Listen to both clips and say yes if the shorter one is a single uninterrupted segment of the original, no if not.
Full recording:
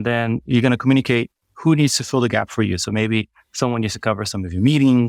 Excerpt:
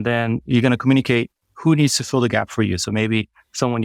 yes